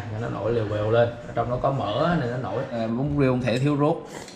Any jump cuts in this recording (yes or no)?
yes